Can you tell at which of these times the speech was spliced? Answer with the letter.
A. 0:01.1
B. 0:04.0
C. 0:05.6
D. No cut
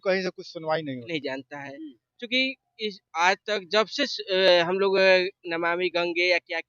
A